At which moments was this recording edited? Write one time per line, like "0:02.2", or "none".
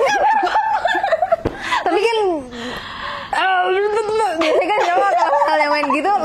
none